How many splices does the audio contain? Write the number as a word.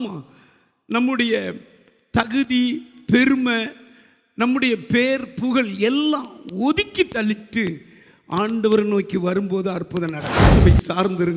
one